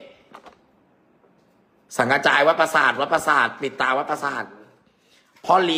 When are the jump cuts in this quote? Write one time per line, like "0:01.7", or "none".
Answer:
none

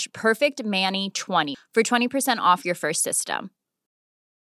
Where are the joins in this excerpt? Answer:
0:01.5

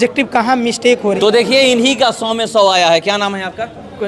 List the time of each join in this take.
0:01.2

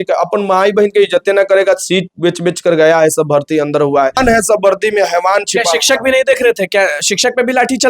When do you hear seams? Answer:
0:04.2

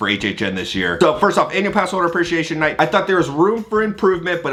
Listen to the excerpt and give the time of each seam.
none

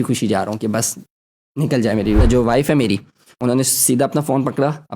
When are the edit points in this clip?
0:02.2
0:03.3

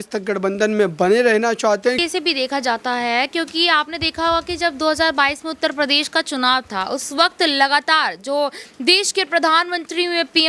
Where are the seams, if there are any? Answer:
0:02.0

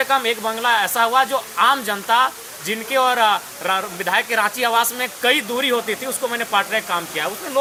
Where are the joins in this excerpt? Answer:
none

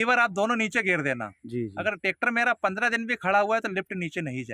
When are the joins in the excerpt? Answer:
none

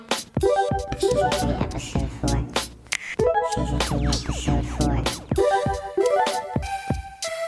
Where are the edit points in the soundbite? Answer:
0:02.6

